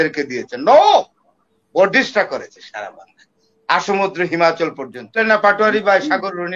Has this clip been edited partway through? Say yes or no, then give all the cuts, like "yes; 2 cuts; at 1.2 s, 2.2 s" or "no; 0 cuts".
yes; 1 cut; at 5.2 s